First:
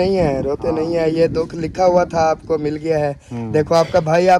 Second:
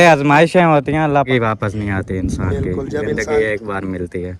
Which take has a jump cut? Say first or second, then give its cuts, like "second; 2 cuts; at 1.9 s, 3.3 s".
second; 1 cut; at 1.3 s